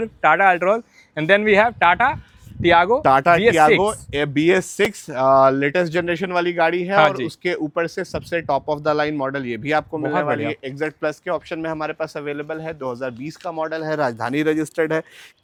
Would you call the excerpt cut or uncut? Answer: uncut